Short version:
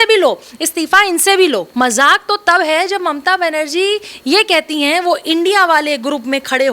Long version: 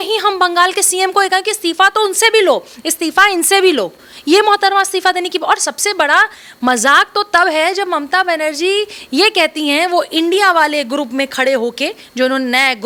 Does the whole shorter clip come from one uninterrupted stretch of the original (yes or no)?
no